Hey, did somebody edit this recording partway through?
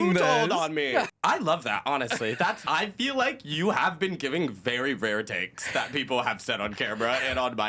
yes; 2 cuts; at 1.1 s, 2.6 s

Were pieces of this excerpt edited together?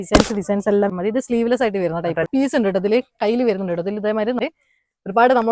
yes; 3 cuts; at 0.9 s, 2.3 s, 4.4 s

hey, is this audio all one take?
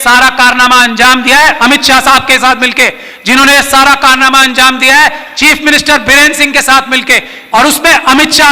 no; 1 cut; at 7.3 s

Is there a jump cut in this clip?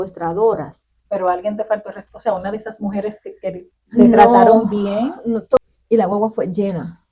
yes; 2 cuts; at 1.1 s, 5.6 s

